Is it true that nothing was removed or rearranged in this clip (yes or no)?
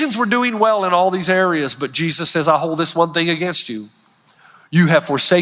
no